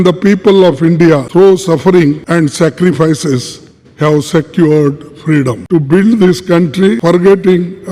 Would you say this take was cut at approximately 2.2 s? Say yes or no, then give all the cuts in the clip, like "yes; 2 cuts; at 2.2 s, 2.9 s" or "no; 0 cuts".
yes; 4 cuts; at 1.3 s, 2.2 s, 5.6 s, 7.0 s